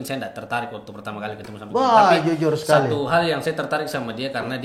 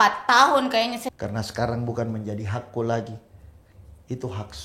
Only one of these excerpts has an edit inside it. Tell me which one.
second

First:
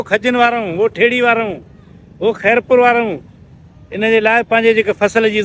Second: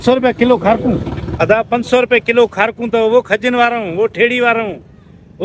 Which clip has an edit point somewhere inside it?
second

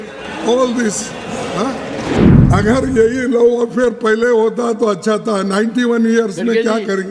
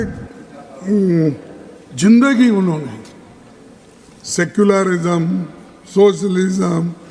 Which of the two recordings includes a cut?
first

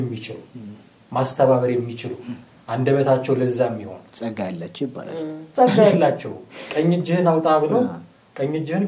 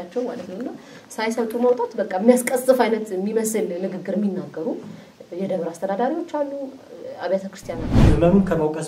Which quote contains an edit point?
second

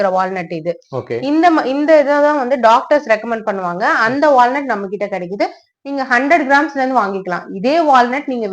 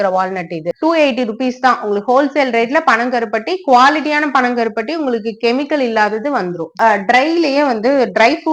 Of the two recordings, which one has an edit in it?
second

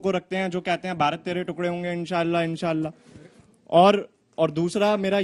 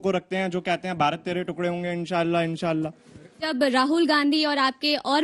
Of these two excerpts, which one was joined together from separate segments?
second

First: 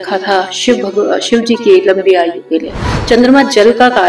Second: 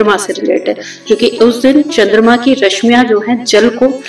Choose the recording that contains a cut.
first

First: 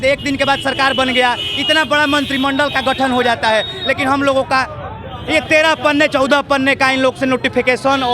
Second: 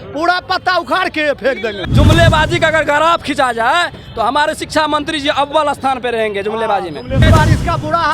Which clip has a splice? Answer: second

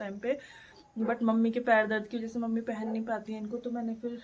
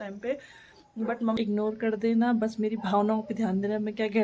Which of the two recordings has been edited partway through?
second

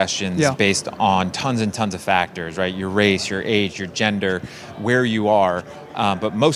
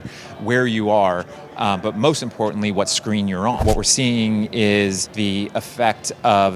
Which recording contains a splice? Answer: second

